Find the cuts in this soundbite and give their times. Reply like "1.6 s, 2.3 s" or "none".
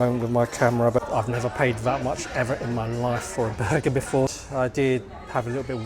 1.0 s, 4.3 s